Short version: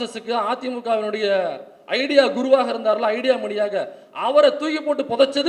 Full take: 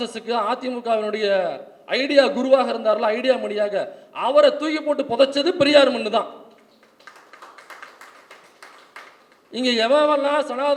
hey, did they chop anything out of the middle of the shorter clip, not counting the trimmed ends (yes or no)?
no